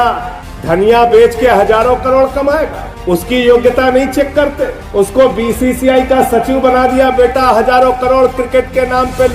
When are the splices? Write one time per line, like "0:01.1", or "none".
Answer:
none